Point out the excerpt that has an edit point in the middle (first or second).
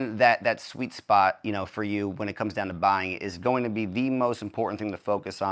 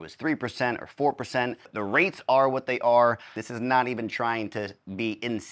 second